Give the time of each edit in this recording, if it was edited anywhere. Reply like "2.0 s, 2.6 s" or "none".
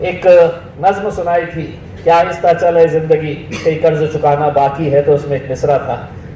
none